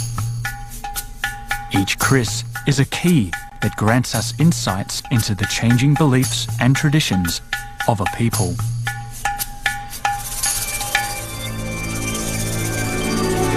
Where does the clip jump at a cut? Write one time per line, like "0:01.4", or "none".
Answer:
none

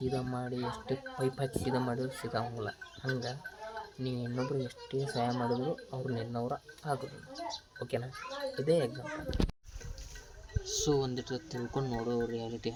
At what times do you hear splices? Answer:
none

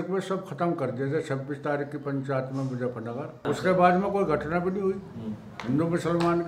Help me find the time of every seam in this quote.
0:03.3

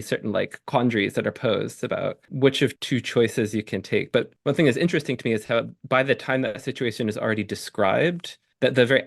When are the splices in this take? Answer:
0:02.2

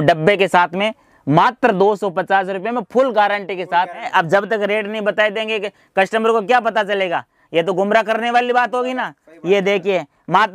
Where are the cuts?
0:04.1

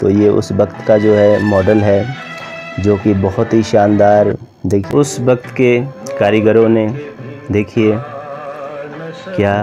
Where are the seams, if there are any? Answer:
0:04.9

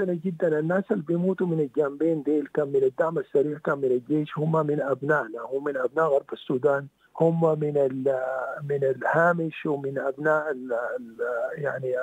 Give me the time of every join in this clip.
0:07.0

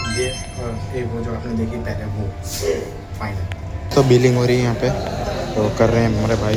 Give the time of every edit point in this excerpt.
none

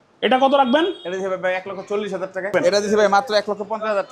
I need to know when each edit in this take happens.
0:02.5

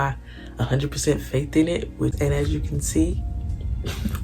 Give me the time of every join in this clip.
0:02.1

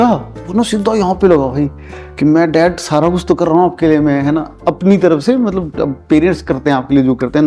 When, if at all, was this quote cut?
none

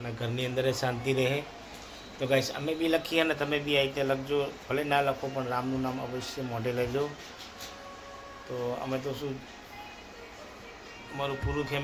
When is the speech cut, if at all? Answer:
none

